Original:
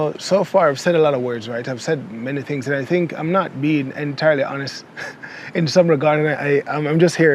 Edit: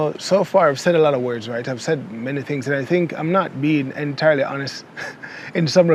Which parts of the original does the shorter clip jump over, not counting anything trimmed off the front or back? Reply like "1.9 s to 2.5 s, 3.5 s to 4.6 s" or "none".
none